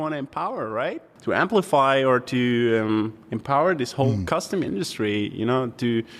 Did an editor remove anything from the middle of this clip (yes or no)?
yes